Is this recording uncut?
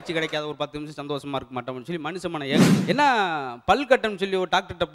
no; 1 cut; at 2.7 s

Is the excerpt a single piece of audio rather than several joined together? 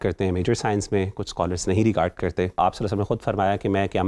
no; 1 cut; at 2.6 s

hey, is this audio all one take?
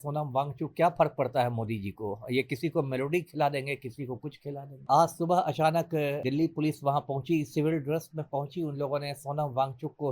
no; 2 cuts; at 4.8 s, 6.2 s

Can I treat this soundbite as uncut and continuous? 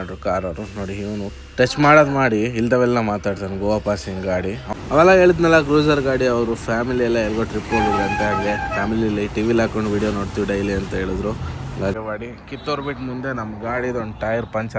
no; 2 cuts; at 4.6 s, 11.9 s

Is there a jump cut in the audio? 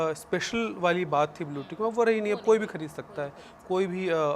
no; 0 cuts

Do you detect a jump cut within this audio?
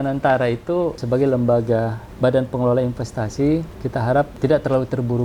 yes; 3 cuts; at 1.0 s, 2.0 s, 4.1 s

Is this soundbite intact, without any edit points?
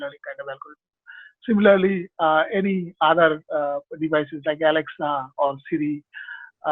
yes; 0 cuts

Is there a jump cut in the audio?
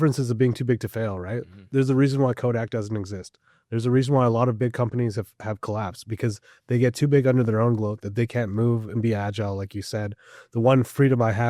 yes; 1 cut; at 1.6 s

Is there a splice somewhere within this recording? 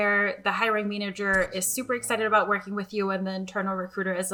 no; 0 cuts

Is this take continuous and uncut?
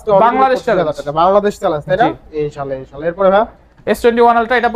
yes; 0 cuts

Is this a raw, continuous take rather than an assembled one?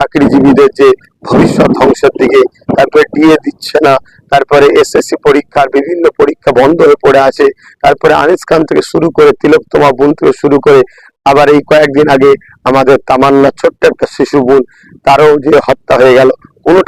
yes; 0 cuts

